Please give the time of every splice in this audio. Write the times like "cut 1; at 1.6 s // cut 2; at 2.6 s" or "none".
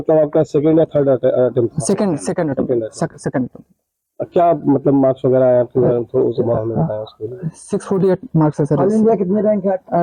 none